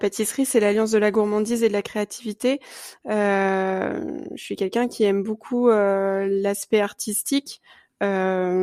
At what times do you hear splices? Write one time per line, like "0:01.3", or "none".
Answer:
none